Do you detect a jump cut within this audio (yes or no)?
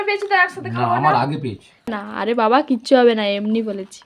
yes